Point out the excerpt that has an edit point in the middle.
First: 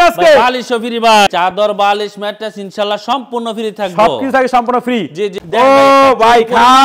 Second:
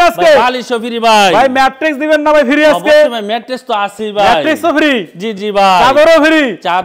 first; 2 cuts; at 1.3 s, 5.4 s

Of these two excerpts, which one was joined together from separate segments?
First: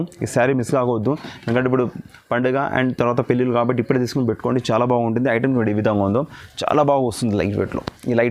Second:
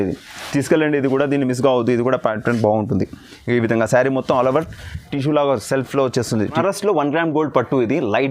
second; 1 cut; at 6.6 s

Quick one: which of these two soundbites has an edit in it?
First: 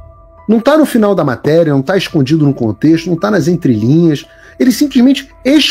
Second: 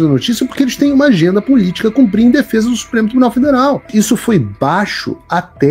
second; 1 cut; at 3.9 s

